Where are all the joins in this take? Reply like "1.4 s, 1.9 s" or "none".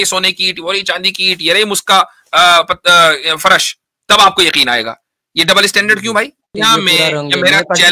6.6 s